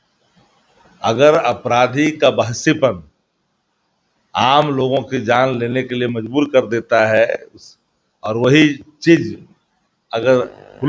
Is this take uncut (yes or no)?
yes